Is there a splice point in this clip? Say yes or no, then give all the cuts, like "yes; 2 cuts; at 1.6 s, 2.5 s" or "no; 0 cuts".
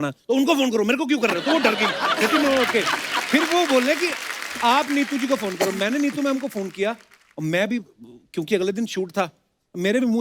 no; 0 cuts